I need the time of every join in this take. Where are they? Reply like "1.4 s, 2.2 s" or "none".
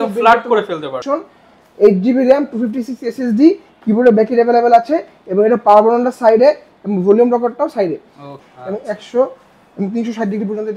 1.0 s, 8.3 s